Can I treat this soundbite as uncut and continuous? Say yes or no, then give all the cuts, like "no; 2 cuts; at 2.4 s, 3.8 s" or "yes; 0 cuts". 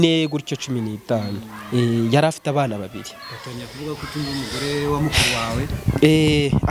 yes; 0 cuts